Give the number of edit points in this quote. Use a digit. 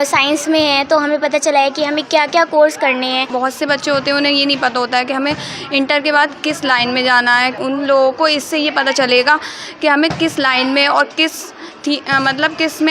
2